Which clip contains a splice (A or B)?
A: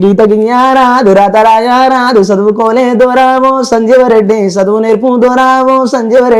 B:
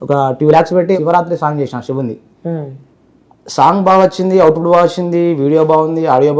B